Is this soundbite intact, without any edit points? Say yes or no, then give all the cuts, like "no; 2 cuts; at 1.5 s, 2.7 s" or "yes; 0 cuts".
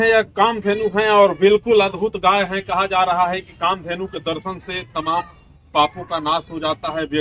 yes; 0 cuts